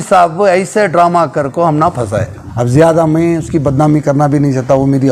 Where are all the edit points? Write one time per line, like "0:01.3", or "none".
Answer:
0:02.4

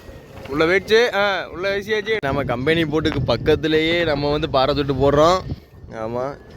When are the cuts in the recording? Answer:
0:02.2

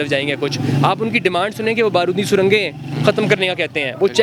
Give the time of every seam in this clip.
none

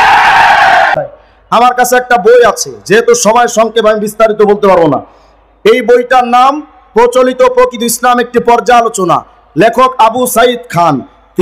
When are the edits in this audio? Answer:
0:01.1

